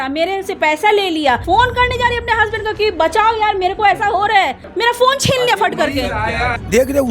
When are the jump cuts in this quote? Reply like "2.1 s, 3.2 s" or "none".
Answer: 1.4 s, 4.7 s, 6.3 s